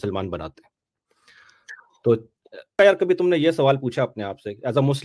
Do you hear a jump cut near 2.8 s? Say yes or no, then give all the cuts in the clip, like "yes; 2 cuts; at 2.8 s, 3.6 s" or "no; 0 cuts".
yes; 1 cut; at 2.8 s